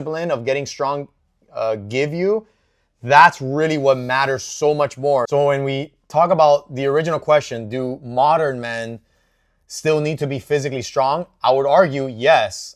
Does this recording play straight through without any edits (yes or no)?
yes